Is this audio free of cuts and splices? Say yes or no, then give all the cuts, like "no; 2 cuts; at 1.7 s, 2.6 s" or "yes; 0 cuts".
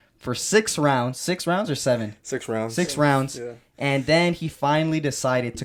yes; 0 cuts